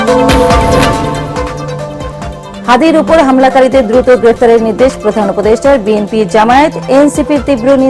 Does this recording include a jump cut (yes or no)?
yes